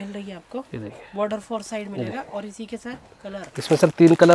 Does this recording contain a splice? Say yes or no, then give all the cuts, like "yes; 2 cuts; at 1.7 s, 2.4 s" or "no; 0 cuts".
no; 0 cuts